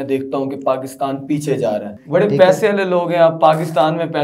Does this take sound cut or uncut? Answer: cut